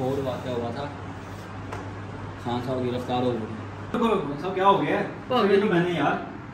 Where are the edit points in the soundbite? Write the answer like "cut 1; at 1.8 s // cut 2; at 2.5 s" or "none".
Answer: cut 1; at 3.9 s

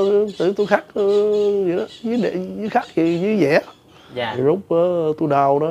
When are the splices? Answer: cut 1; at 4.3 s

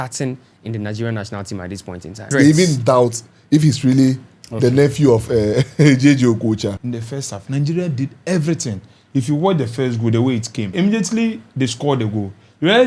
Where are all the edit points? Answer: cut 1; at 2.3 s // cut 2; at 6.8 s // cut 3; at 10.7 s

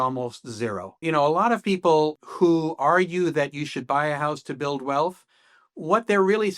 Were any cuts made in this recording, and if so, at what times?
cut 1; at 1.0 s

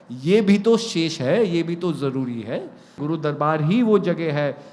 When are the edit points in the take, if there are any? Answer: cut 1; at 3.0 s

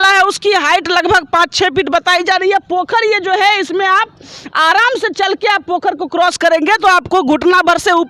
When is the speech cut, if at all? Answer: none

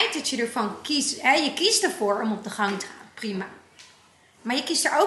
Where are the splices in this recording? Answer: none

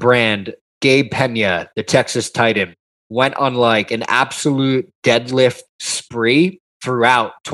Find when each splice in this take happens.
none

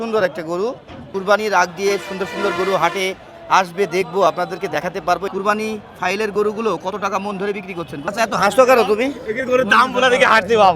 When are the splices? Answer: cut 1; at 1.1 s // cut 2; at 5.2 s // cut 3; at 8.1 s

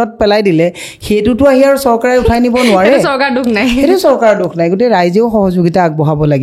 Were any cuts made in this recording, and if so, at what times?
none

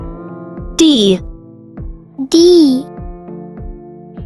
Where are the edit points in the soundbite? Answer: none

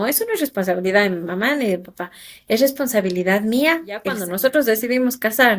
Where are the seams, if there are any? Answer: cut 1; at 4.2 s

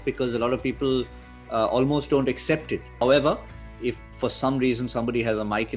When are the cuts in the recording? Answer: cut 1; at 2.9 s

